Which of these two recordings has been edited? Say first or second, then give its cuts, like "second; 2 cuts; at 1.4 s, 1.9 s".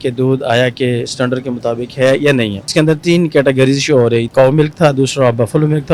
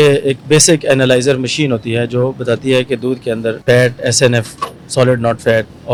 first; 2 cuts; at 2.7 s, 4.3 s